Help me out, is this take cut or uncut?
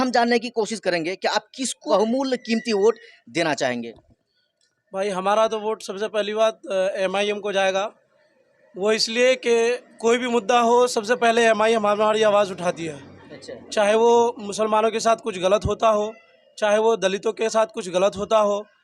cut